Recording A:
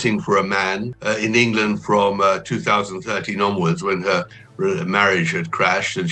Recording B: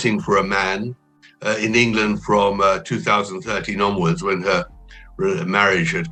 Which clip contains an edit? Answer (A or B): A